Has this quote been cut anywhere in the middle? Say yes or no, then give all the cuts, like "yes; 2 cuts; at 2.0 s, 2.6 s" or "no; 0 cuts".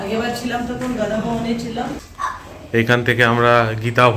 yes; 1 cut; at 2.1 s